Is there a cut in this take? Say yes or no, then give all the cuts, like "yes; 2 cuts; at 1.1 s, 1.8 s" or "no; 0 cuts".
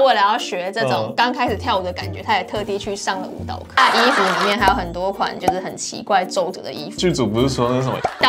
yes; 2 cuts; at 3.8 s, 7.0 s